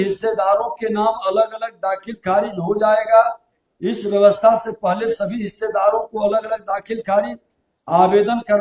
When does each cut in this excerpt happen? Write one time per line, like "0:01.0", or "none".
none